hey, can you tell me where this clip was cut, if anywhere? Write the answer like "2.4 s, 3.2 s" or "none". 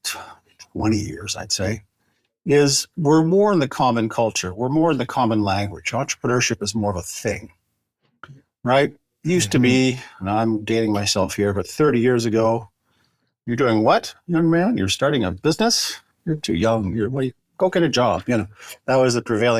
none